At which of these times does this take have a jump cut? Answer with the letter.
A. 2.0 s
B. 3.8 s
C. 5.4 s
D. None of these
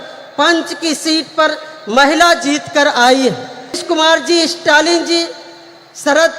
B